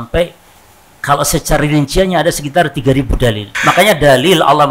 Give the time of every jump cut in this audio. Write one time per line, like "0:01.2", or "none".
0:03.5